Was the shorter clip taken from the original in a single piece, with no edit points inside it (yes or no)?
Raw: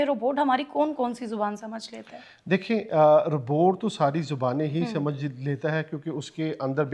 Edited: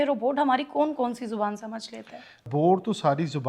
no